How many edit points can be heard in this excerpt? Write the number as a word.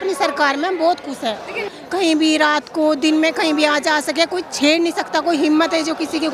one